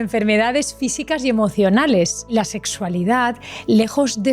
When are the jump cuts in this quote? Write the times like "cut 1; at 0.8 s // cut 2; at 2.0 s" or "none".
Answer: cut 1; at 2.3 s